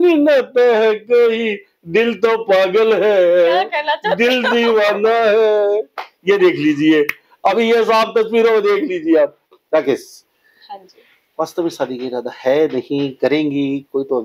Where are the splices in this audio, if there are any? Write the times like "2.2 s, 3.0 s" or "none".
none